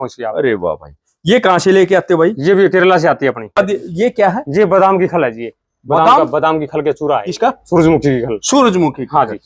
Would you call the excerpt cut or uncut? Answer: cut